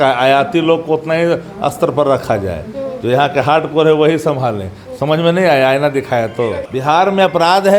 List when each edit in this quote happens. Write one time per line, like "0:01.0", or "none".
0:06.6